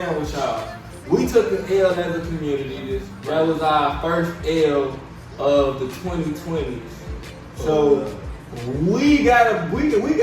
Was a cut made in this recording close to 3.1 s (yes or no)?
yes